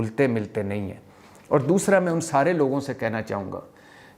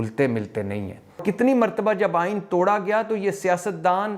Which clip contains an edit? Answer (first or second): second